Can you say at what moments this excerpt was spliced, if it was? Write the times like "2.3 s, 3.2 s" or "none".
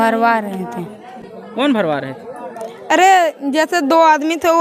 none

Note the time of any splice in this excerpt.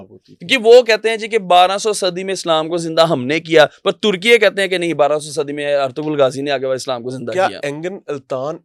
none

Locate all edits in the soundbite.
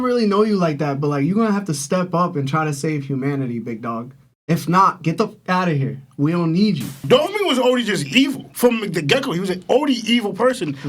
6.9 s

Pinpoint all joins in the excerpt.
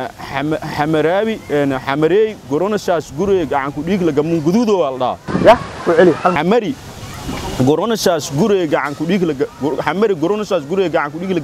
none

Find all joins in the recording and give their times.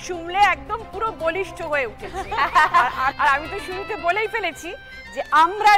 3.1 s

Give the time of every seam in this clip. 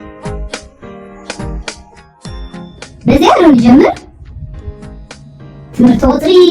2.9 s

